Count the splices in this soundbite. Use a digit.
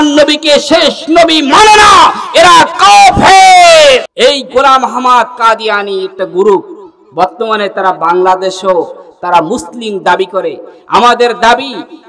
1